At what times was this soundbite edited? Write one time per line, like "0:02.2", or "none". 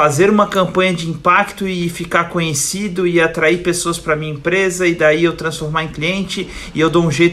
none

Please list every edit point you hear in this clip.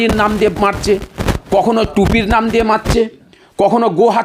none

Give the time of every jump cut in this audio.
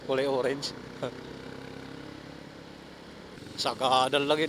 0:03.4

